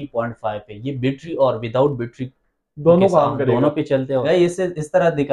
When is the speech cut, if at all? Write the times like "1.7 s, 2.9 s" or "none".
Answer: 4.2 s